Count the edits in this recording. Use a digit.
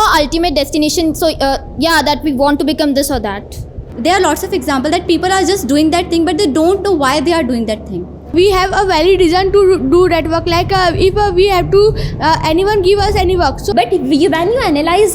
3